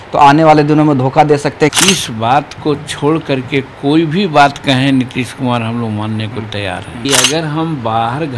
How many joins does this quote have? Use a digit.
2